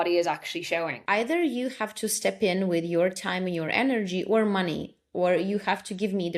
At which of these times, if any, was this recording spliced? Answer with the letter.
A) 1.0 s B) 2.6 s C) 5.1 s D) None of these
A